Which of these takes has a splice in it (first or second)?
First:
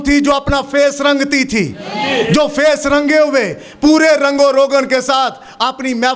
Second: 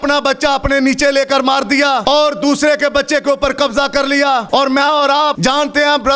second